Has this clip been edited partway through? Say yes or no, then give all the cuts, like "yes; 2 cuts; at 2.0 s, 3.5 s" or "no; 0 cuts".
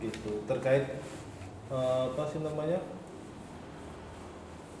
no; 0 cuts